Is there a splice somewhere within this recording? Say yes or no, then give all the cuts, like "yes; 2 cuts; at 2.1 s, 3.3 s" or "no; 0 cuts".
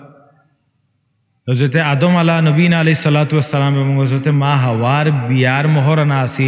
no; 0 cuts